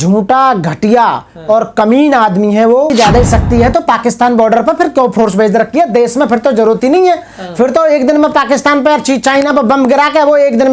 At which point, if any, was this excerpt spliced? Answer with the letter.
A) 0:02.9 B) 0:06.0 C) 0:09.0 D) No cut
A